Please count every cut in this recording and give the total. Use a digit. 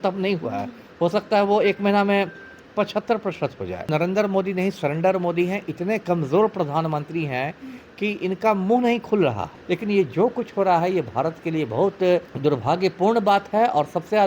3